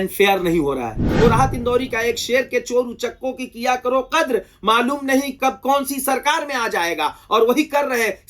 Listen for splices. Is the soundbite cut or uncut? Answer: cut